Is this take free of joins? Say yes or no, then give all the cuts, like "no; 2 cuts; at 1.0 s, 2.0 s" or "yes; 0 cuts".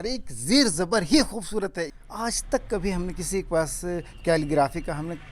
no; 1 cut; at 1.8 s